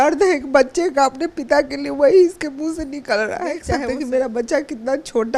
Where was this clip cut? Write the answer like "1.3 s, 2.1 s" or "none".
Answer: 3.7 s